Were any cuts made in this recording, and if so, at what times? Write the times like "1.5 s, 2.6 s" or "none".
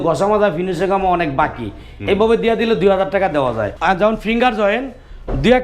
3.7 s